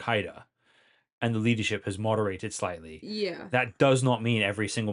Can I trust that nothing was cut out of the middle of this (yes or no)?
yes